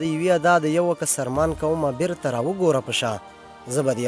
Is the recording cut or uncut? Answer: uncut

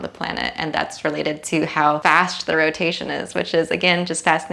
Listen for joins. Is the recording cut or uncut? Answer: cut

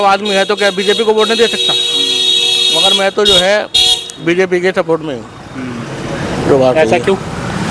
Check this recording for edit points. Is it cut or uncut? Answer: uncut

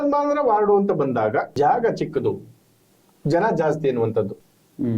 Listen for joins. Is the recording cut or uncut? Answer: cut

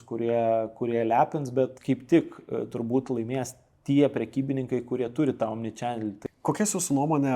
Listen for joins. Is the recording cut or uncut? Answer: cut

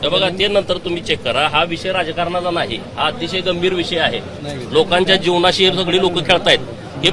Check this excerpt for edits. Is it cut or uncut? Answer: uncut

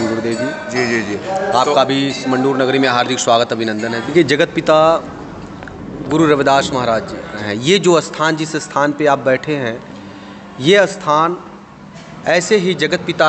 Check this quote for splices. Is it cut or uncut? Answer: cut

